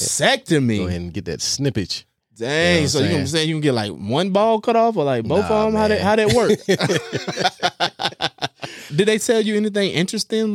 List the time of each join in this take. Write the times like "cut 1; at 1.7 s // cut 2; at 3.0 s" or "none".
cut 1; at 8.9 s

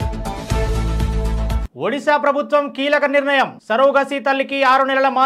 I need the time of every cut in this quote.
cut 1; at 1.6 s

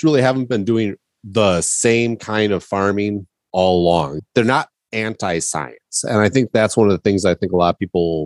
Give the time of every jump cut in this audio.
cut 1; at 4.2 s

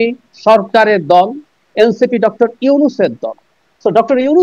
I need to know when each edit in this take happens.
none

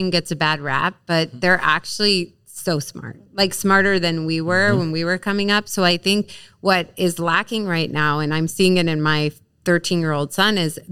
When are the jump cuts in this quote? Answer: none

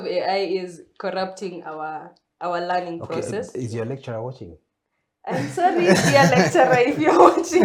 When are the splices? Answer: none

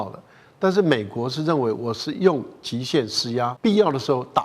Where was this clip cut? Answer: cut 1; at 3.5 s

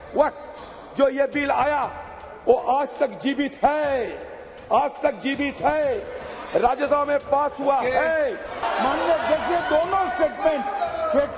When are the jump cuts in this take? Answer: cut 1; at 8.6 s

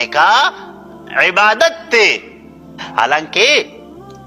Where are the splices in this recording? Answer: cut 1; at 2.9 s

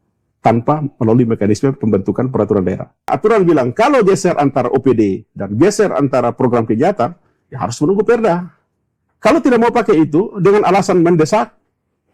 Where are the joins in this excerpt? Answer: cut 1; at 3.1 s // cut 2; at 9.0 s

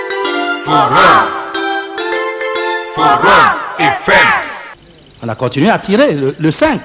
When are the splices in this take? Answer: cut 1; at 4.5 s

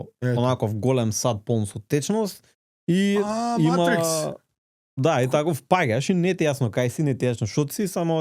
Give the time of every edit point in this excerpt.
none

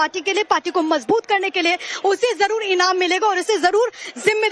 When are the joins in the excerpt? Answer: none

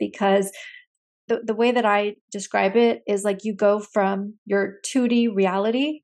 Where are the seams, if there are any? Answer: cut 1; at 1.2 s

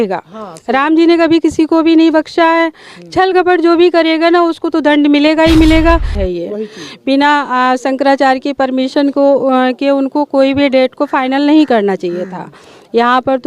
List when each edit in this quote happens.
cut 1; at 6.1 s

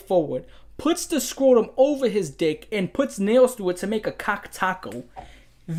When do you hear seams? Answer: none

